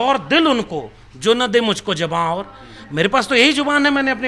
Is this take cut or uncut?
uncut